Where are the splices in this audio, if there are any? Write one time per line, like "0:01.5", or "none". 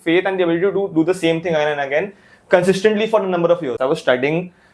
0:03.8